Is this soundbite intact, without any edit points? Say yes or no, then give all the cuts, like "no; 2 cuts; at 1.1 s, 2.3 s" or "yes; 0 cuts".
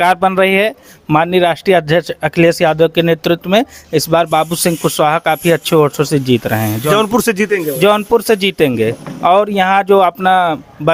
yes; 0 cuts